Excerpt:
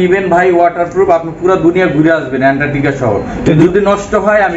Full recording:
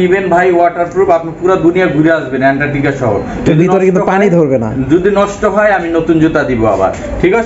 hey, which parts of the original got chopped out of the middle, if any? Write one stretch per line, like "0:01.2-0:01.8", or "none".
0:03.6-0:04.9